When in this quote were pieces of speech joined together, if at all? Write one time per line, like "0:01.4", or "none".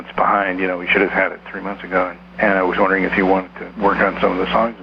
0:02.2
0:03.6